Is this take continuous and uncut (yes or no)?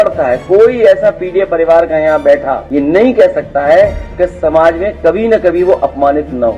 no